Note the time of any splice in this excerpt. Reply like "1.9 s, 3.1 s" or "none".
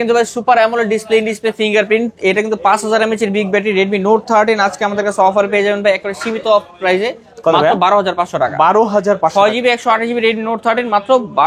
none